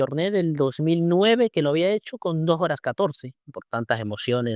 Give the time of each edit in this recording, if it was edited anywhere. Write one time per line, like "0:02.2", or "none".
0:03.3